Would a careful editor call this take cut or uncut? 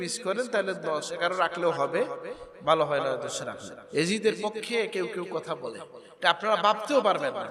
cut